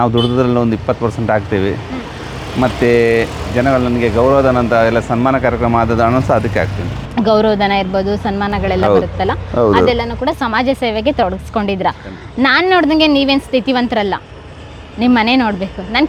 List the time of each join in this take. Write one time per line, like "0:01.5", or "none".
none